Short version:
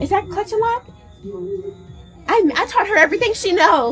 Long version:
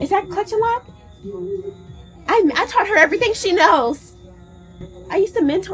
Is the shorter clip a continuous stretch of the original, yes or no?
yes